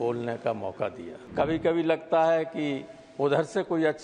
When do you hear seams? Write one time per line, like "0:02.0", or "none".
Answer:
0:01.1